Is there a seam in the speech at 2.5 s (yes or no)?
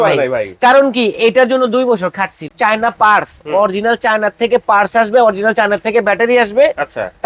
yes